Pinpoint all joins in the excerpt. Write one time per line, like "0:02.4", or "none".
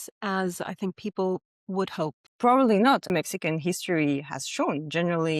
0:02.2
0:03.1